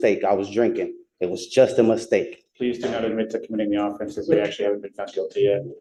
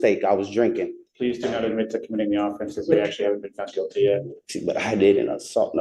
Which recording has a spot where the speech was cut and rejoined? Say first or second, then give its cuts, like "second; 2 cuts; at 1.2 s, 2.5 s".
second; 2 cuts; at 1.0 s, 4.4 s